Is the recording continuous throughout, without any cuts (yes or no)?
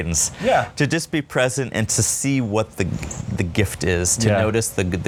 yes